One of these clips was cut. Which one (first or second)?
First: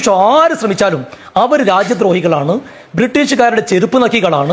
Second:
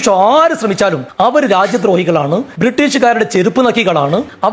second